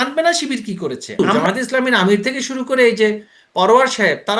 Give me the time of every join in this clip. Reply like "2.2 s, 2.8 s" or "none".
1.2 s